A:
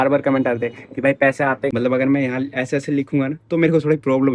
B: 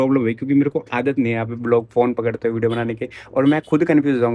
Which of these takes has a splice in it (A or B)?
A